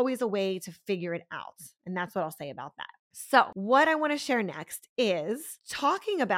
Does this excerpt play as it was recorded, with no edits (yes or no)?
yes